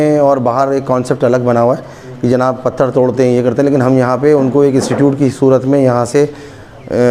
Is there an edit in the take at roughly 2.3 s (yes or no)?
no